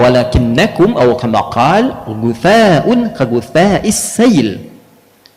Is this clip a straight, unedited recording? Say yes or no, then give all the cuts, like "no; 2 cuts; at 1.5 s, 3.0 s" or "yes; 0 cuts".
yes; 0 cuts